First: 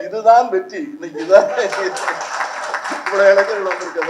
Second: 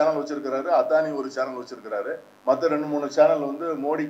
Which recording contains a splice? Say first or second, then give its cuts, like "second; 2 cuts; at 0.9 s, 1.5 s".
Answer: second; 1 cut; at 2.3 s